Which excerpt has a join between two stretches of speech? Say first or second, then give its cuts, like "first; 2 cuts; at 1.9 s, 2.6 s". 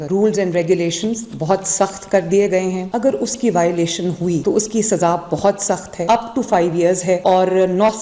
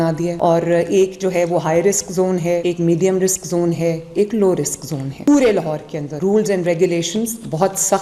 first; 1 cut; at 2.9 s